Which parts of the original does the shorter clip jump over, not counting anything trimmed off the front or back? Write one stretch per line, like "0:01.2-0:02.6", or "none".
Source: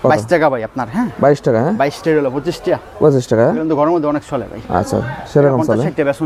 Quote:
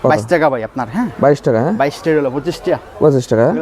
none